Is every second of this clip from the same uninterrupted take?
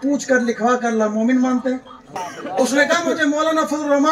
no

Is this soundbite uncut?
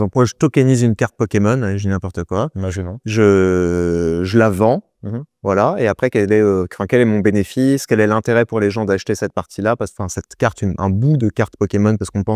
yes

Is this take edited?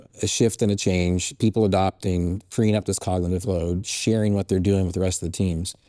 no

